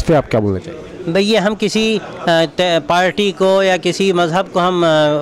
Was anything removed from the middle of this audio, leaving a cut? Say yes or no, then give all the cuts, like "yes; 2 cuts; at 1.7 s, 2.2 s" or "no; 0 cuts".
no; 0 cuts